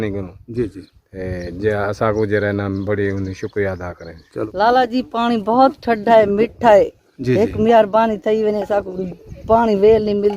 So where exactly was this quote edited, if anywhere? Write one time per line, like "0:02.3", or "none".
0:04.4

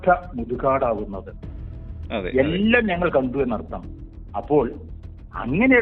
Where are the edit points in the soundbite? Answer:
none

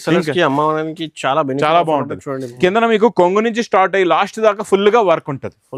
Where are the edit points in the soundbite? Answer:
0:02.4

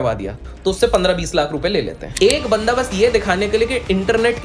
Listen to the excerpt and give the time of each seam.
0:02.1

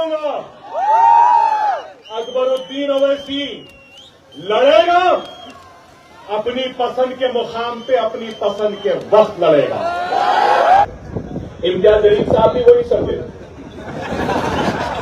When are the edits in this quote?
0:10.8

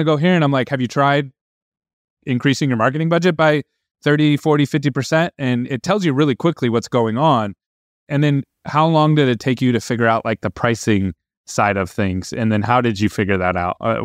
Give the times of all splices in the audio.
0:07.9

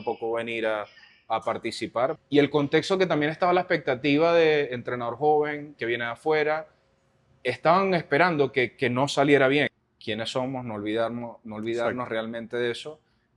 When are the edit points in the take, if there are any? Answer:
0:02.2
0:09.7

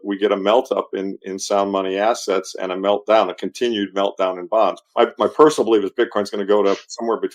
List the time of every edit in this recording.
0:04.8

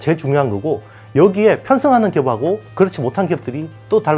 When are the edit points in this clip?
0:02.7

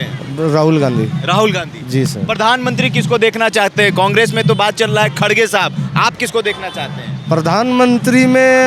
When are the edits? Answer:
none

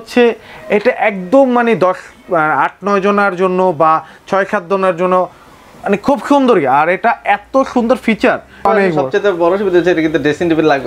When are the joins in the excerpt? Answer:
0:08.6

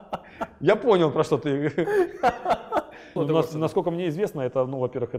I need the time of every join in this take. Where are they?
0:03.2

